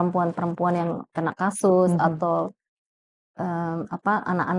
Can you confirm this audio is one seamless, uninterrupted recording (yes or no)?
yes